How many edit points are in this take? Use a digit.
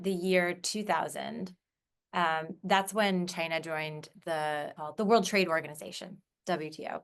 1